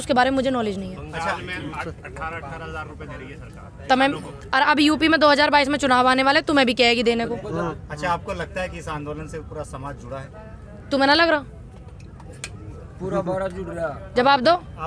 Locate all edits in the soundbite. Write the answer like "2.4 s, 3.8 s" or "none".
7.8 s